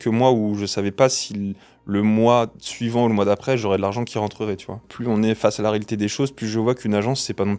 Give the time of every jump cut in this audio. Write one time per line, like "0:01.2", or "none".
0:04.9